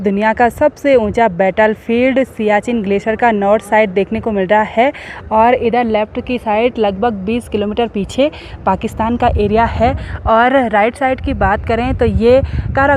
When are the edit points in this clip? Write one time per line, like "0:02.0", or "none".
none